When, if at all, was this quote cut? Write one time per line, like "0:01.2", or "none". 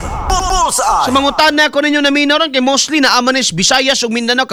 none